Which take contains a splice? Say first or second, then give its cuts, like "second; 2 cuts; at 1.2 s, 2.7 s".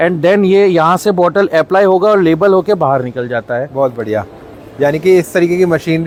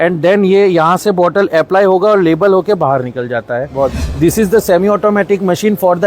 second; 1 cut; at 4.0 s